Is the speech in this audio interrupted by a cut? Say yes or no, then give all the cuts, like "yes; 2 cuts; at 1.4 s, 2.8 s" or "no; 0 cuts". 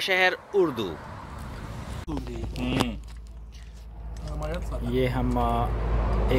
yes; 1 cut; at 2.0 s